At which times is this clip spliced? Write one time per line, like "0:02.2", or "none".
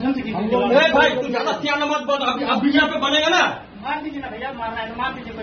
none

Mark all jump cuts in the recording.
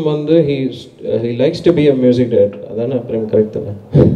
none

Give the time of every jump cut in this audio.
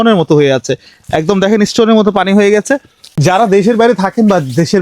0:03.0

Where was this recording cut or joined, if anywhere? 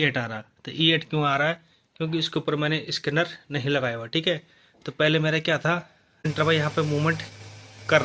0:06.2

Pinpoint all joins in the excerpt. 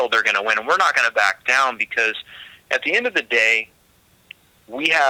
none

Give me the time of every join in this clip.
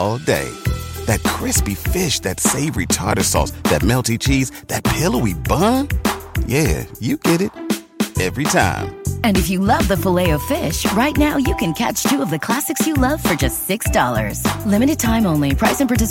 none

